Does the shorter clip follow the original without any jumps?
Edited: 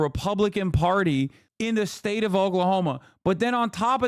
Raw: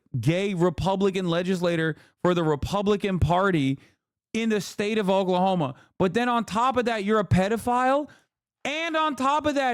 no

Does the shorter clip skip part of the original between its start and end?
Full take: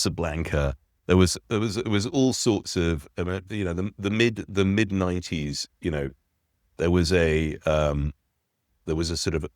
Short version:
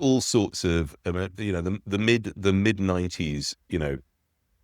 no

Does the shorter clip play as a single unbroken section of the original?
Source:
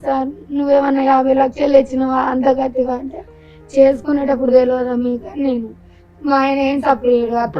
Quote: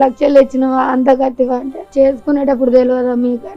no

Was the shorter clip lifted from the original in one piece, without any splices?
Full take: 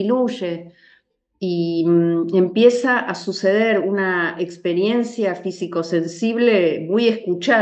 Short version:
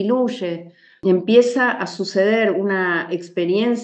no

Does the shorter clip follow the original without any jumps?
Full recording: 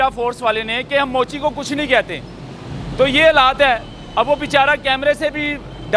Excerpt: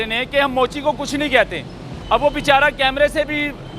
no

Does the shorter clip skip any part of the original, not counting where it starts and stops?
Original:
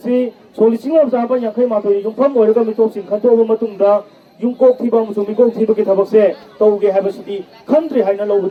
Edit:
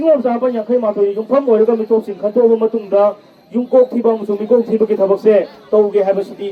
no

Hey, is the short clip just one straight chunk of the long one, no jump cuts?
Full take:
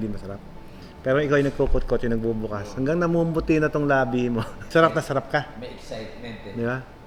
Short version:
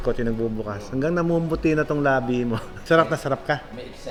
yes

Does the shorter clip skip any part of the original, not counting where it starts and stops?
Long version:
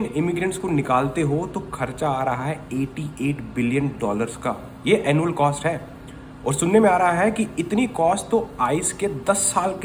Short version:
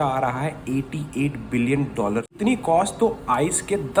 yes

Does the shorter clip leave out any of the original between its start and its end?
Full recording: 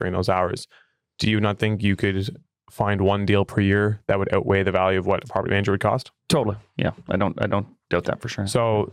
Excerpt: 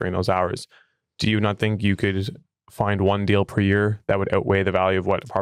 no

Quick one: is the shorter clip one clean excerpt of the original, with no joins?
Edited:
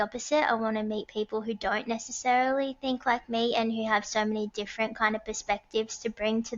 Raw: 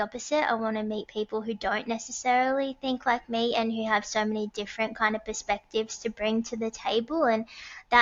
yes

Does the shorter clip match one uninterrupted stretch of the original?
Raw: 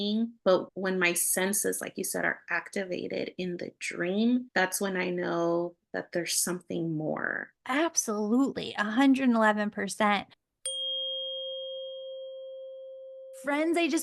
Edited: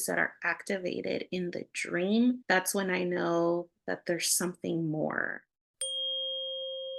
no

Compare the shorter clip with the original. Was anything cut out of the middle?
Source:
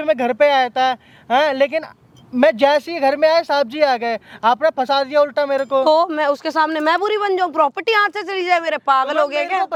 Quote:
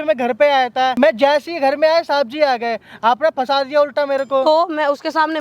yes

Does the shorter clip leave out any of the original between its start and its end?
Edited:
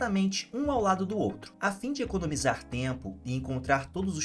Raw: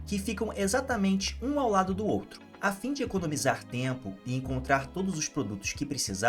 yes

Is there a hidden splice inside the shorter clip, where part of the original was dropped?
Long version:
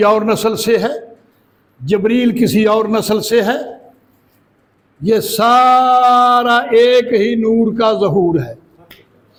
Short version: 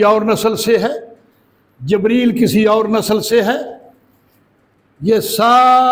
no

